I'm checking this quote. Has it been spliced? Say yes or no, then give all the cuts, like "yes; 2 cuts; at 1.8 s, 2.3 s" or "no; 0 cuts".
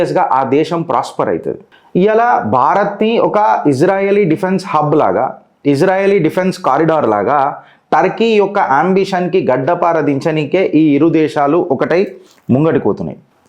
no; 0 cuts